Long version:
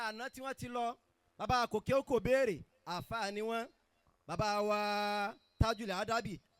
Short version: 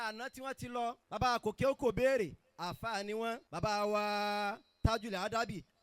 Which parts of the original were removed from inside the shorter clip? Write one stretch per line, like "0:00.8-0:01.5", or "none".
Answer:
0:01.0-0:01.3
0:03.8-0:04.2